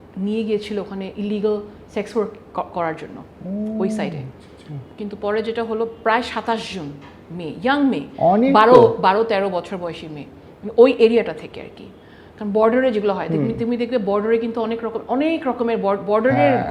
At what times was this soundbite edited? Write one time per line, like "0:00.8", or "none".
none